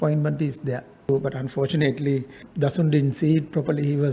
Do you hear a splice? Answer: yes; 2 cuts; at 1.1 s, 2.4 s

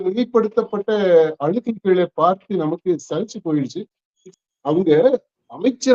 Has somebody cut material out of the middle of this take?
yes; 1 cut; at 4.2 s

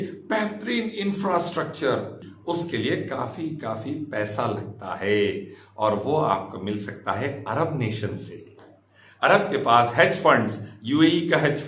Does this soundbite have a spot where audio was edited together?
yes; 1 cut; at 2.3 s

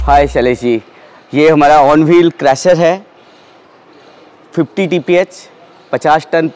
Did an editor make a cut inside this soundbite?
no; 0 cuts

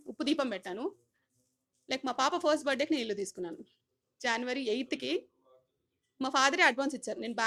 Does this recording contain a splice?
no; 0 cuts

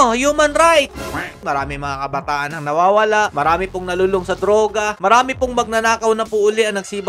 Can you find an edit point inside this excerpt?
yes; 1 cut; at 1.4 s

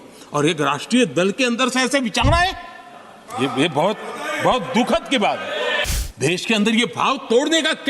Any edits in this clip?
yes; 1 cut; at 5.9 s

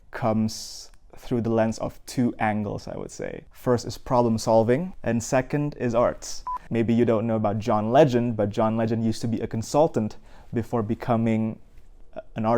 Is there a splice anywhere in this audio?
yes; 3 cuts; at 3.5 s, 4.9 s, 6.5 s

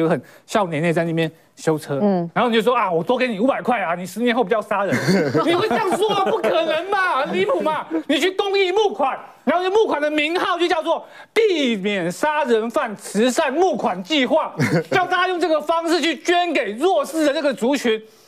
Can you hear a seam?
no; 0 cuts

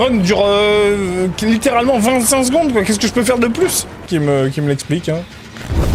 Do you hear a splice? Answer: yes; 1 cut; at 4.1 s

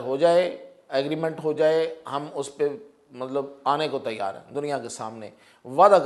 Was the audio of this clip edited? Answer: no; 0 cuts

